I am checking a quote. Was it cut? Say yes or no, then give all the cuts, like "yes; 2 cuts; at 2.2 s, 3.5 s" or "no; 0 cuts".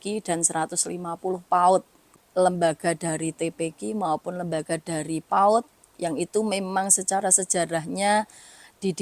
yes; 1 cut; at 2.2 s